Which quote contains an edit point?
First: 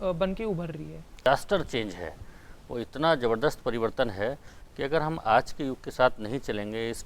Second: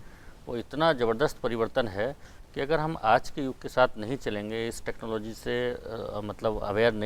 first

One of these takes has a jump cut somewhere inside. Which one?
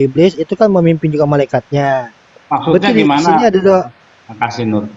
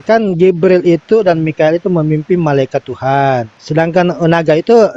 second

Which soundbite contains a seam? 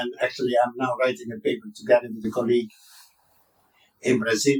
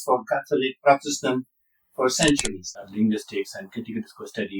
second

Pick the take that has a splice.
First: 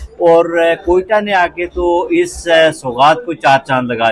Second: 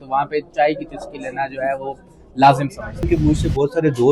second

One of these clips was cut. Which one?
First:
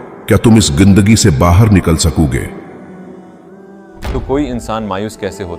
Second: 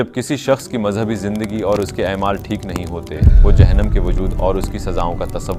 first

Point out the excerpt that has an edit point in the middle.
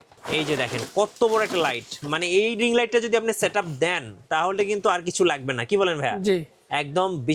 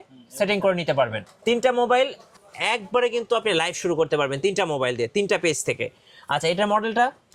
second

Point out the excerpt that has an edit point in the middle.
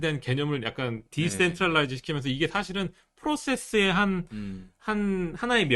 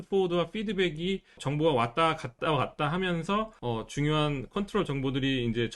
second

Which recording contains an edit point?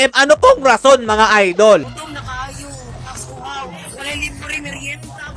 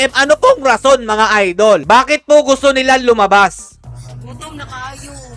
first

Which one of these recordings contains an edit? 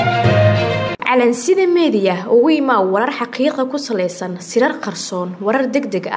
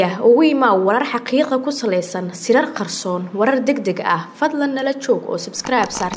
first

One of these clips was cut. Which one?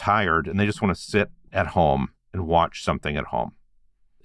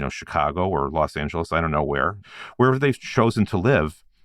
second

